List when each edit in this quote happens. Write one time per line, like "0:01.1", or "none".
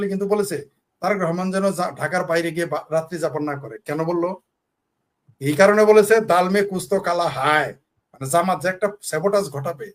none

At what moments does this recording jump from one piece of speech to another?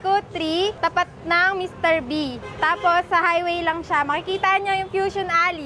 none

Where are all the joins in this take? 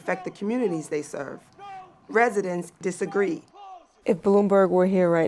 0:02.8
0:03.8

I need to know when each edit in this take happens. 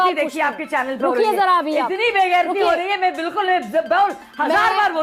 none

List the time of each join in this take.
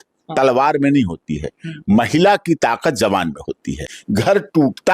0:03.9

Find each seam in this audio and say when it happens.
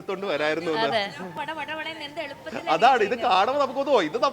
0:01.3

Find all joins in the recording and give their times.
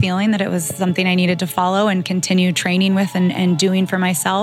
none

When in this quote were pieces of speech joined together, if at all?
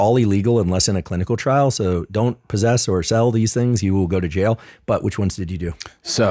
none

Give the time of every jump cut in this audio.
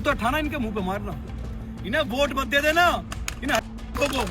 none

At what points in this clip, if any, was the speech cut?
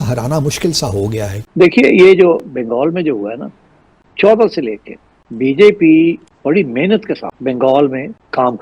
0:01.4
0:04.0

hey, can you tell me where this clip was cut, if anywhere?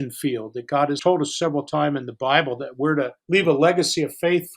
0:01.0
0:03.2

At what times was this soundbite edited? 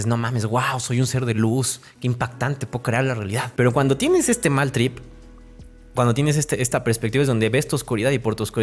0:03.4

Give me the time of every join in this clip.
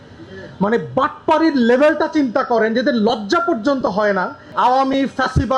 0:04.4

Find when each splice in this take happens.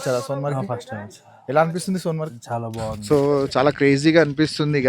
0:03.0

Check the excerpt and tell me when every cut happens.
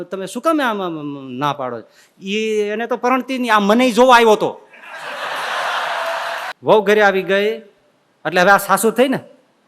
0:06.5

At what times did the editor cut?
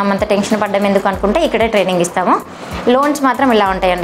none

